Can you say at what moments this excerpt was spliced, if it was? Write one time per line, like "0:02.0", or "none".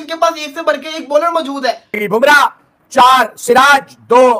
0:02.0